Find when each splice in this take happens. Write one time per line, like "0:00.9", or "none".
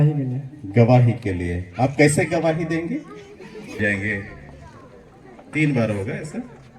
0:03.8